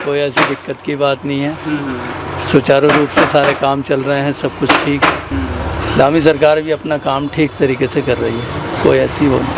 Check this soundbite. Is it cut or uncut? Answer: uncut